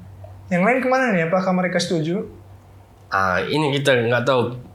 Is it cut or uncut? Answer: uncut